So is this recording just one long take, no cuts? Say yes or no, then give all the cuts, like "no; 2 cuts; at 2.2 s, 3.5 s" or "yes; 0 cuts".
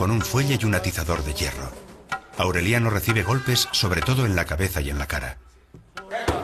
yes; 0 cuts